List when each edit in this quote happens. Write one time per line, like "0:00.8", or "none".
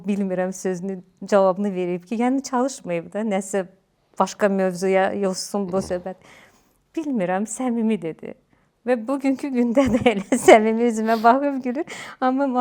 none